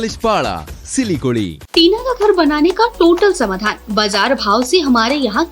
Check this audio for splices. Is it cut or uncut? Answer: cut